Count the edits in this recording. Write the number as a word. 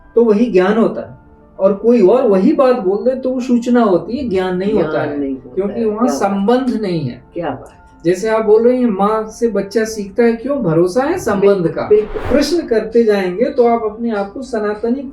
one